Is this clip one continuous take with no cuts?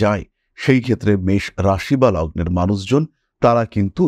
yes; 0 cuts

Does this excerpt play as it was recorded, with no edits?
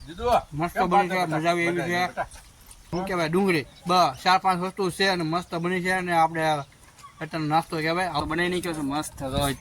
no; 2 cuts; at 2.9 s, 8.2 s

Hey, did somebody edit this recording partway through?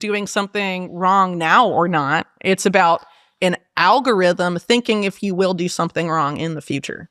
no; 0 cuts

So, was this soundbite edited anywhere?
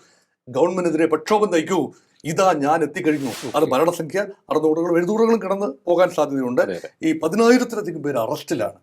yes; 1 cut; at 3.3 s

